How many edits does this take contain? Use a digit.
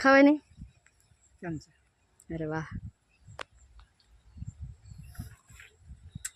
0